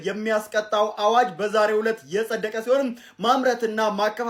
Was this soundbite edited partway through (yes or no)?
no